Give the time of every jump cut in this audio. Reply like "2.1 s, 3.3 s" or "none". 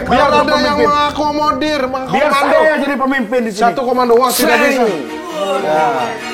none